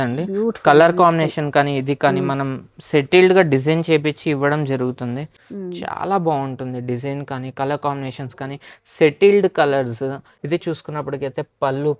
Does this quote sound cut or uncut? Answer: cut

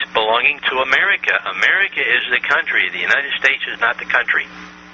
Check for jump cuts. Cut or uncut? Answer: uncut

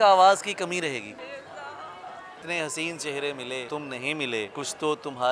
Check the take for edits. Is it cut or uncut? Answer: cut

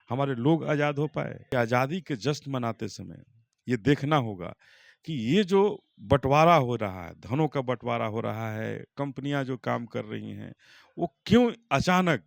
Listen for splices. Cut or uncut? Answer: cut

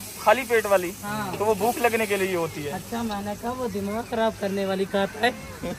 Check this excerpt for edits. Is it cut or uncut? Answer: uncut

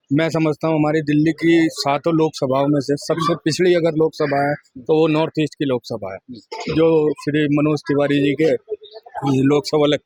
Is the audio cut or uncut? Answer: uncut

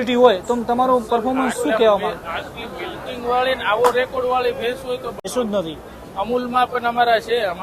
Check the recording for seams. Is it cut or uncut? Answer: cut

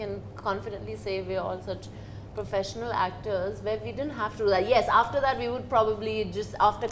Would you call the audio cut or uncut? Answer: uncut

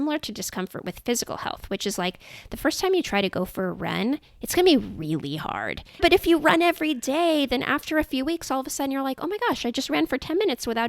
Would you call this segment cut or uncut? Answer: cut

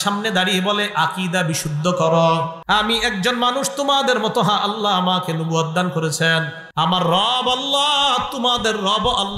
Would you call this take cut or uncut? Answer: cut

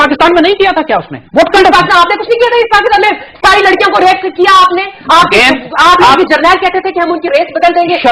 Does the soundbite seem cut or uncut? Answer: uncut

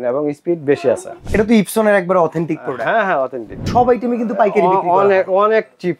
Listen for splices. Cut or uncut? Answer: cut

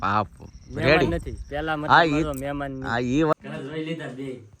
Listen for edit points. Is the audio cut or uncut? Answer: cut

